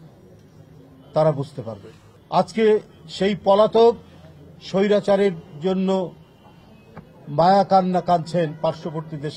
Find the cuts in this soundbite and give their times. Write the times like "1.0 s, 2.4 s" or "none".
none

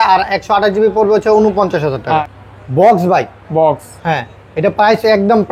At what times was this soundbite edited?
2.3 s

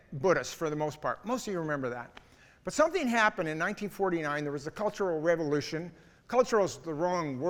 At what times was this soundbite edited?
none

